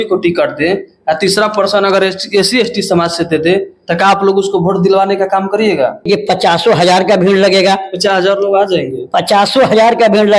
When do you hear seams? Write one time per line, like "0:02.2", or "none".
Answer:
0:06.1